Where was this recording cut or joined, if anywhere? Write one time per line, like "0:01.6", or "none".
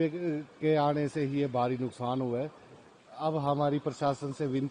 none